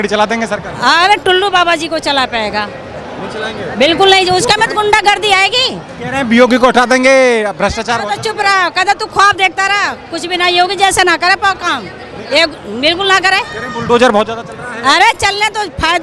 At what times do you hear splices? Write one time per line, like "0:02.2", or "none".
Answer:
none